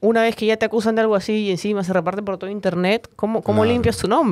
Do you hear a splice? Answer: no; 0 cuts

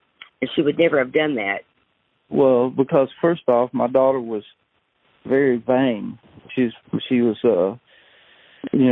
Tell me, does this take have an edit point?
yes; 1 cut; at 1.6 s

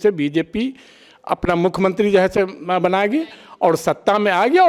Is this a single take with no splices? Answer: yes; 0 cuts

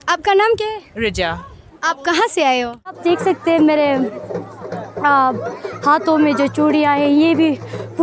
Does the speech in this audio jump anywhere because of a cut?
yes; 1 cut; at 3.0 s

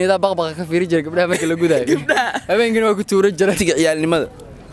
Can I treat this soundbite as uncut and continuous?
no; 1 cut; at 3.6 s

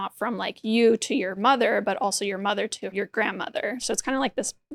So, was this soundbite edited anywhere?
yes; 2 cuts; at 2.9 s, 3.8 s

